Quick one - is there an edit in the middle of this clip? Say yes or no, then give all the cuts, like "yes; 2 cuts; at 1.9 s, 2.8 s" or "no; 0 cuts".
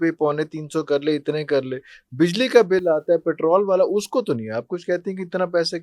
no; 0 cuts